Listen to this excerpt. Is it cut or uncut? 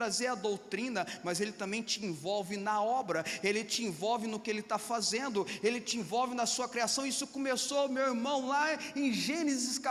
uncut